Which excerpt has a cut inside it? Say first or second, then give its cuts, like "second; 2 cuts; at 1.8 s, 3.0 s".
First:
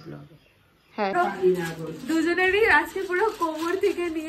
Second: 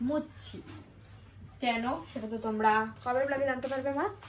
first; 1 cut; at 1.1 s